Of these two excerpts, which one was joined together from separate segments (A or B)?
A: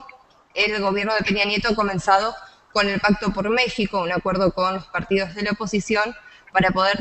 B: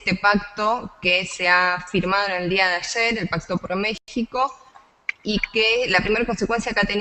B